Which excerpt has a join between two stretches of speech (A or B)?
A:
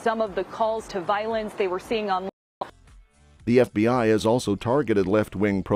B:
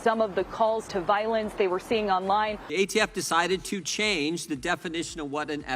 B